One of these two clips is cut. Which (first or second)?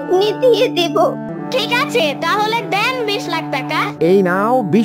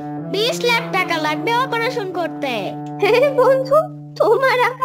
first